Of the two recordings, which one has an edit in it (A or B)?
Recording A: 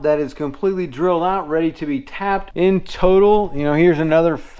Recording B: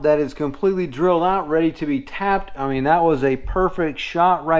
A